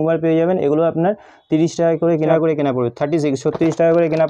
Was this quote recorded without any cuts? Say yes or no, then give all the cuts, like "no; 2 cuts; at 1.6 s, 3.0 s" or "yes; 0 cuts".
no; 1 cut; at 2.3 s